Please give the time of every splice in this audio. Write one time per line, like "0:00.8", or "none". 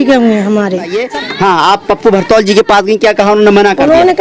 0:01.0